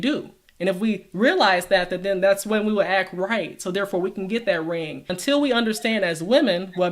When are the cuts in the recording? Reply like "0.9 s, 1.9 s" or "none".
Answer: 5.2 s

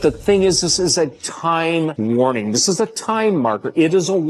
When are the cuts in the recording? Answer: 1.9 s

